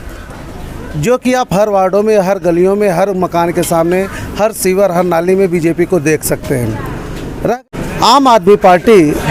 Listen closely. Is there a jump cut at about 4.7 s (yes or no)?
no